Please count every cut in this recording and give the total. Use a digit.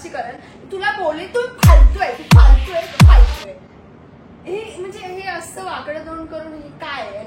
0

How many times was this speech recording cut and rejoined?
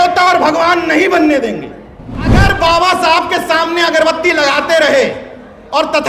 1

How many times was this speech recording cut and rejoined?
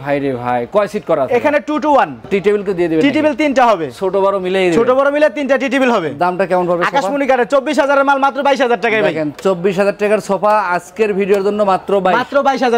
0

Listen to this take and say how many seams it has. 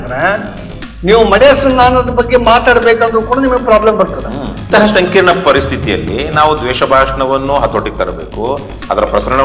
1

